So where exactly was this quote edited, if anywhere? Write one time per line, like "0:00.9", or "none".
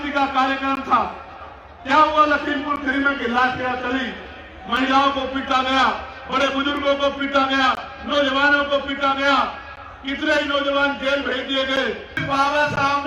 0:12.2